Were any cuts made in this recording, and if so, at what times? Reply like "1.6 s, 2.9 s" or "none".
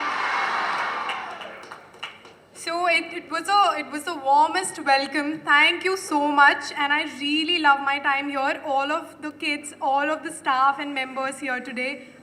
none